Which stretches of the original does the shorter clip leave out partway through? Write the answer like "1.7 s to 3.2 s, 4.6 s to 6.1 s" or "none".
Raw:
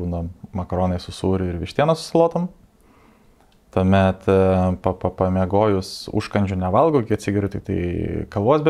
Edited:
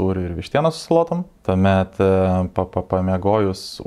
2.6 s to 3.6 s